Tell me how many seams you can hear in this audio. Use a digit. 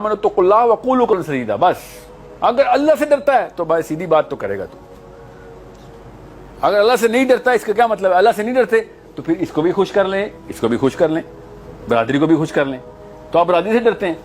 1